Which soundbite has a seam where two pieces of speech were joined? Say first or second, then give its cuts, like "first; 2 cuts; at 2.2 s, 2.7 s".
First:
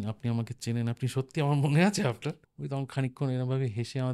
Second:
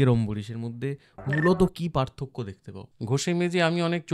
first; 1 cut; at 2.5 s